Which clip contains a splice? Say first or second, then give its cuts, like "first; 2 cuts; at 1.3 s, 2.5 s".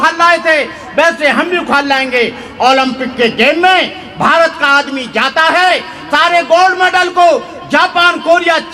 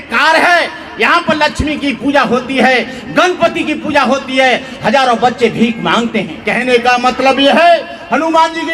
second; 1 cut; at 6.4 s